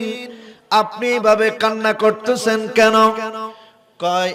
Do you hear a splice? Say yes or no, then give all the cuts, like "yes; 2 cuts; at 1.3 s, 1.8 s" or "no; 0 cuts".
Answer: no; 0 cuts